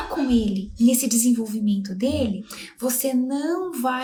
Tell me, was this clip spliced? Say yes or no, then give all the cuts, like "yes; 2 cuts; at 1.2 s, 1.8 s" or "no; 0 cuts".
no; 0 cuts